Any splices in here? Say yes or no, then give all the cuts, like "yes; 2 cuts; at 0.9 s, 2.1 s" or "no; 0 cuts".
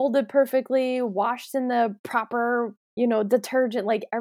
yes; 1 cut; at 2.8 s